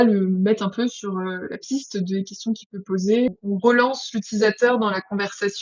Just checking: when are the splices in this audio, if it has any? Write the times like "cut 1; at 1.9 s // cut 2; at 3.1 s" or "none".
cut 1; at 3.3 s